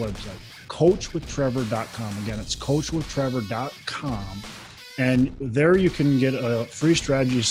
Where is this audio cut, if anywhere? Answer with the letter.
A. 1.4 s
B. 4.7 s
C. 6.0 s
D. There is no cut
D